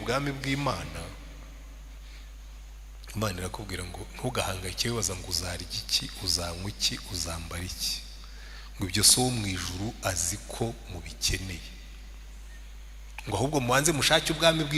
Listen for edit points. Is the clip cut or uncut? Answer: uncut